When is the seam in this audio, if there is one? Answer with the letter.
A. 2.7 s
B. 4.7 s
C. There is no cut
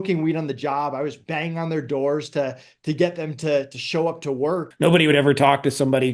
B